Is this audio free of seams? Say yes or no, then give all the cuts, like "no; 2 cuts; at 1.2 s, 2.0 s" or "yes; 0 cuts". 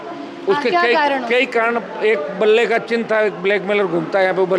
yes; 0 cuts